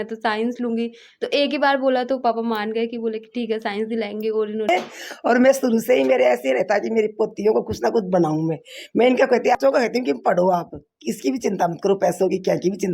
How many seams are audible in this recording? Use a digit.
2